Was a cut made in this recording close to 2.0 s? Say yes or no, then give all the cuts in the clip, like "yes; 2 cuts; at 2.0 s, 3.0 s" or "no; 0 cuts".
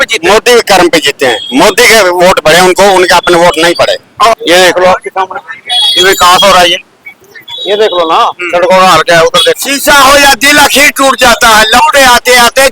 no; 2 cuts; at 4.3 s, 9.6 s